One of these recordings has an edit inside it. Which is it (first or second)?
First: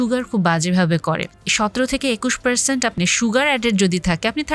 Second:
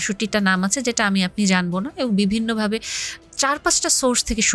first